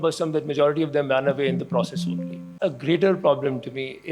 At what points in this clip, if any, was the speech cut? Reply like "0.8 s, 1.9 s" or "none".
2.5 s